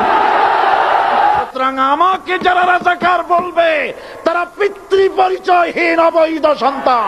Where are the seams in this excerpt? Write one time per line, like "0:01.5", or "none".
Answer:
0:01.3